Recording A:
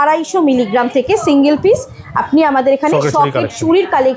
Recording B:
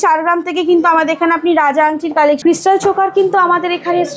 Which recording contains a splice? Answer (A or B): B